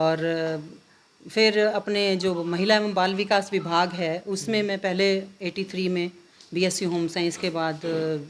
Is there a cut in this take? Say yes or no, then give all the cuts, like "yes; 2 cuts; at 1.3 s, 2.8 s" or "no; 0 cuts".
no; 0 cuts